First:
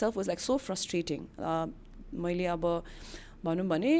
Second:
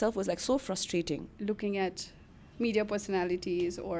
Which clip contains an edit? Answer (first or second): second